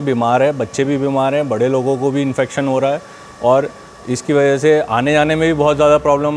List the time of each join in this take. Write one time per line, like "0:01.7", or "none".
none